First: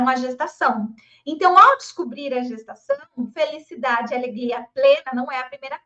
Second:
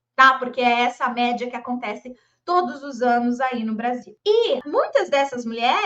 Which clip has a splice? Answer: second; 2 cuts; at 4.1 s, 4.6 s

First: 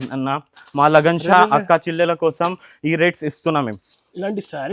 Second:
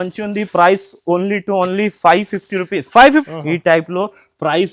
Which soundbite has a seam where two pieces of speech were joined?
second; 1 cut; at 3.3 s

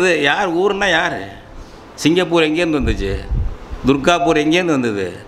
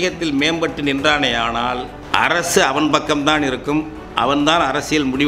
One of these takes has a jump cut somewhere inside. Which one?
second; 1 cut; at 1.9 s

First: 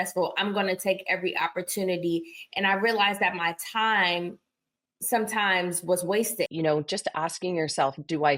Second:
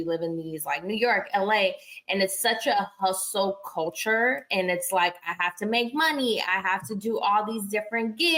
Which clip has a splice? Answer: first; 1 cut; at 6.5 s

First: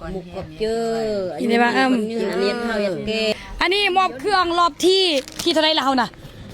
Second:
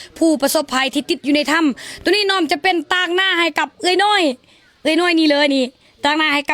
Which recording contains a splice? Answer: first; 1 cut; at 3.3 s

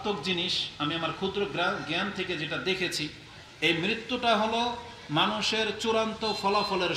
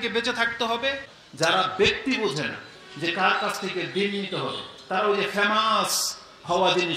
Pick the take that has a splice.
second; 1 cut; at 1.1 s

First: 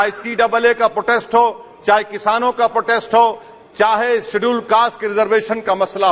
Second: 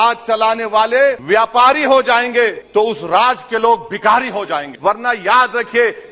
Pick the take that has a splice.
second; 3 cuts; at 1.2 s, 2.6 s, 4.7 s

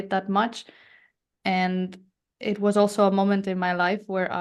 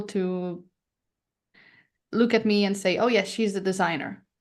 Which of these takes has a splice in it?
second; 1 cut; at 1.5 s

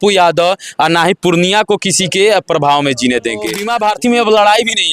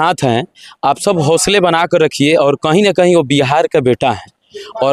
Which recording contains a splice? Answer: first; 1 cut; at 3.6 s

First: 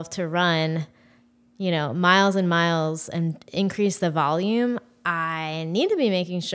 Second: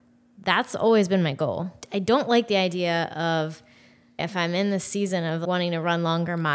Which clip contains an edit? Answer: second; 3 cuts; at 1.7 s, 4.2 s, 5.4 s

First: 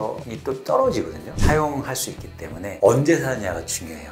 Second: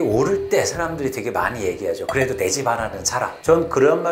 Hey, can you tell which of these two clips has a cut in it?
first; 1 cut; at 1.2 s

